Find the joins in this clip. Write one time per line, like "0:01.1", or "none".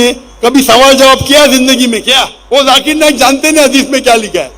0:02.3